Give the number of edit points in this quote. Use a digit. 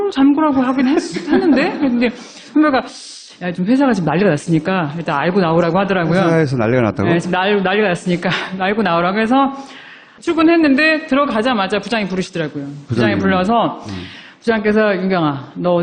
1